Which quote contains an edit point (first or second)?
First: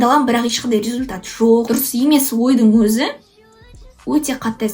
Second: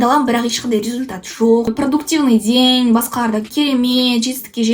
second